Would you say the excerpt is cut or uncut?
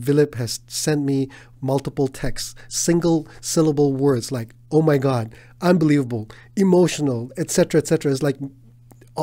uncut